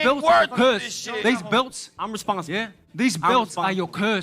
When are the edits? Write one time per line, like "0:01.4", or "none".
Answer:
0:02.8